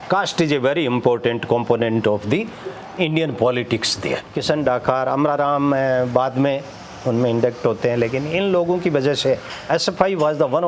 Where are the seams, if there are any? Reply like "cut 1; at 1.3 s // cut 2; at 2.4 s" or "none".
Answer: cut 1; at 4.3 s